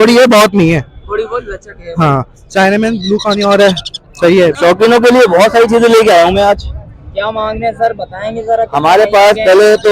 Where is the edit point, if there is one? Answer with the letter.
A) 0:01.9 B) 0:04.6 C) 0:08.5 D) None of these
B